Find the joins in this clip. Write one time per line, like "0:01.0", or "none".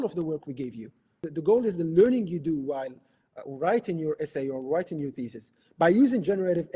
0:01.2